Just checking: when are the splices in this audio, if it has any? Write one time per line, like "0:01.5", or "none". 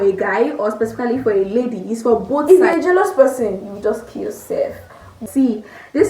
0:02.4
0:05.2